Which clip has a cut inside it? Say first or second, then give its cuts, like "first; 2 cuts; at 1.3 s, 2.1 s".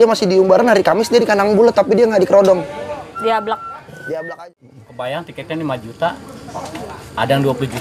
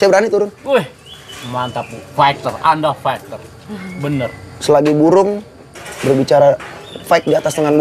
first; 1 cut; at 4.4 s